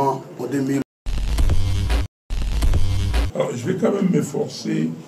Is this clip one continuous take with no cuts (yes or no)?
no